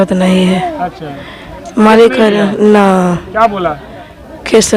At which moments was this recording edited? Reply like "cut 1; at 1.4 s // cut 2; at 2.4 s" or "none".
none